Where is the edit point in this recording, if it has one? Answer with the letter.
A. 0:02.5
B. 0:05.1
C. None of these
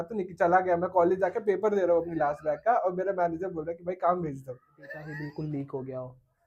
B